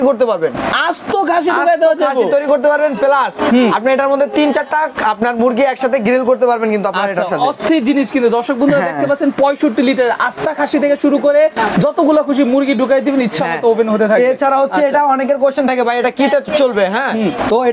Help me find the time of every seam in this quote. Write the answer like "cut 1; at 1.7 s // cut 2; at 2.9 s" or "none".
none